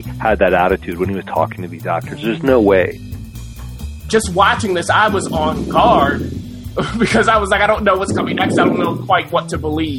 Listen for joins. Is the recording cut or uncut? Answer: cut